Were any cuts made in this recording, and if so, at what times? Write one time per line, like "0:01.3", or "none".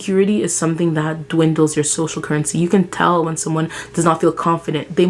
none